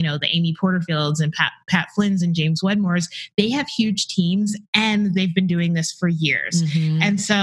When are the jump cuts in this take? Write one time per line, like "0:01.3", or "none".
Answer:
none